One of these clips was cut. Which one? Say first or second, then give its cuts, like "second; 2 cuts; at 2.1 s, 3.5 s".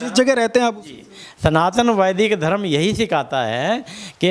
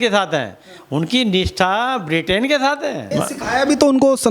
second; 1 cut; at 3.0 s